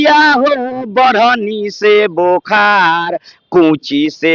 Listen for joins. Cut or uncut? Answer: uncut